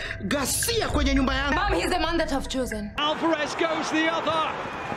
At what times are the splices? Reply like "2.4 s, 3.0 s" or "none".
3.0 s